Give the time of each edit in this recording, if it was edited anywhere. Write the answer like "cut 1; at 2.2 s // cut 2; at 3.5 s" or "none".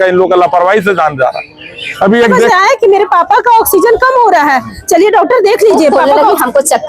cut 1; at 2.4 s // cut 2; at 6.0 s